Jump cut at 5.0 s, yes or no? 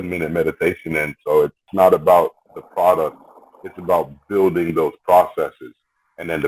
no